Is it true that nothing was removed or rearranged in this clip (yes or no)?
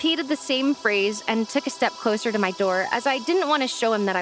yes